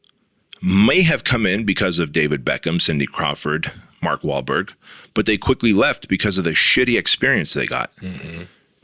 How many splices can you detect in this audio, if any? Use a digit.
0